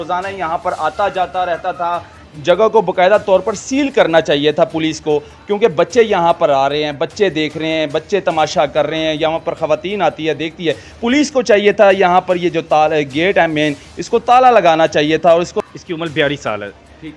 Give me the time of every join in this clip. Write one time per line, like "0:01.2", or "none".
0:02.3
0:15.6